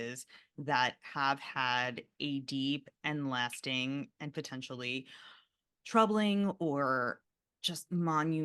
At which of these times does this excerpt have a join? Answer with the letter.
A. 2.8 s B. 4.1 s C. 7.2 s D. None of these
C